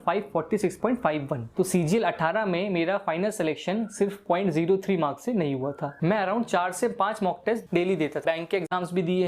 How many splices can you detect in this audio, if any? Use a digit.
3